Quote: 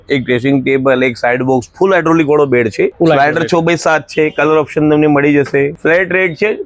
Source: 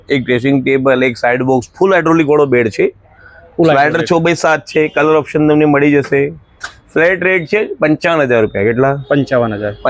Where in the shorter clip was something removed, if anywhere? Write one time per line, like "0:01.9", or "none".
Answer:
0:02.9
0:05.8